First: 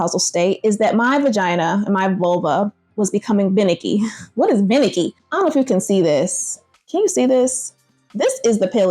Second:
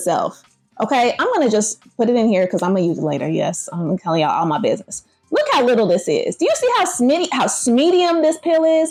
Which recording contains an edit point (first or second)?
first